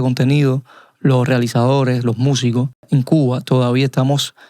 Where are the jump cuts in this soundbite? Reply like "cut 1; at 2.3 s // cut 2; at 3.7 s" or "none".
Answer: cut 1; at 2.9 s